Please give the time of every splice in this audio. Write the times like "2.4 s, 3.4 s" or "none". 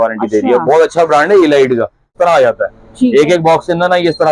2.2 s